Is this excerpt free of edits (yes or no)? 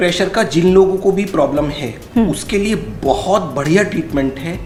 yes